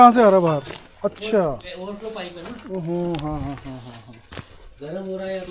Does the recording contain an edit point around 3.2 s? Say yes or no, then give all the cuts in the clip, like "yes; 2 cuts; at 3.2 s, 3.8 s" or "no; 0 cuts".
no; 0 cuts